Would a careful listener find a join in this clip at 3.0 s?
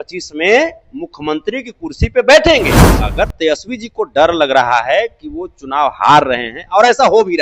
yes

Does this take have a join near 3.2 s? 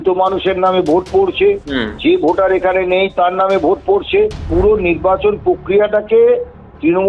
no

